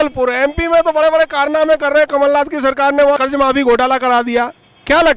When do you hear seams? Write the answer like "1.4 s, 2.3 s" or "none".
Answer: 3.2 s